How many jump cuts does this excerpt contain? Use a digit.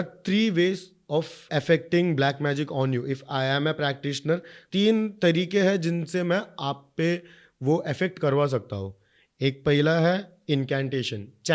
2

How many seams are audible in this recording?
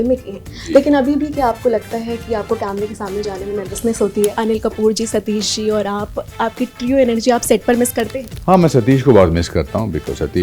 2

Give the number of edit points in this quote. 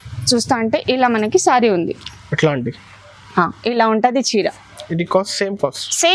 0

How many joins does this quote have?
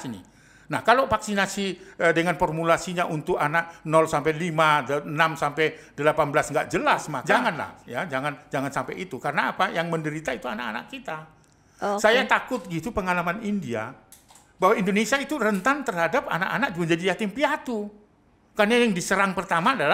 1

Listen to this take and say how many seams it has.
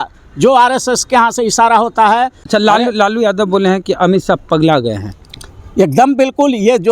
1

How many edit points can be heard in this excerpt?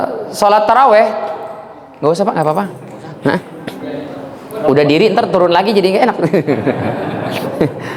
0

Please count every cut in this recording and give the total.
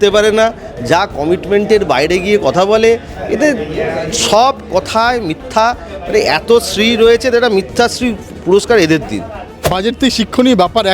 1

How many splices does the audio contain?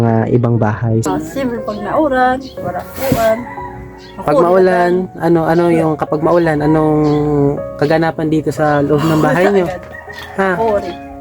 1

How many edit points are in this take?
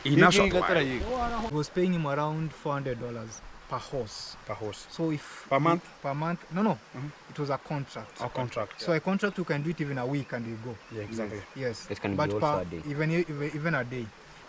1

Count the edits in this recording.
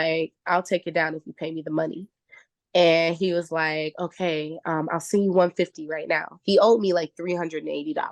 0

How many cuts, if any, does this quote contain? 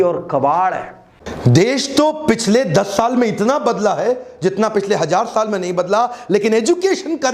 1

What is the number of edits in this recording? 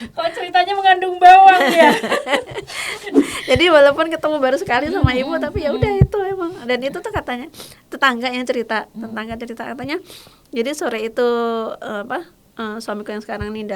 1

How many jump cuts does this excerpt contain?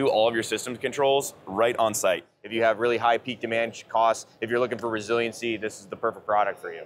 1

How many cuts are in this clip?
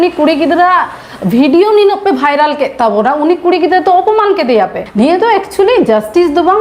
1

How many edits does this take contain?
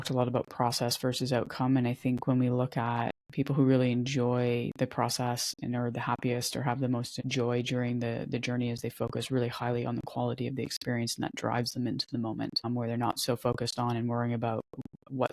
3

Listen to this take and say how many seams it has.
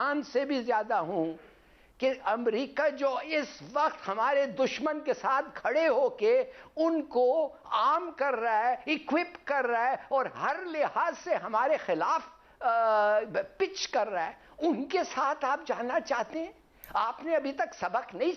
0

